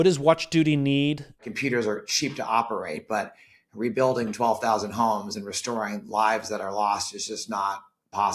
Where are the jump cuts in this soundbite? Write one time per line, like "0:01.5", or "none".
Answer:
0:01.4